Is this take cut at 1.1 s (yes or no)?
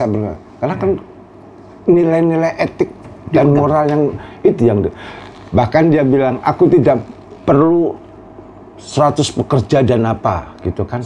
no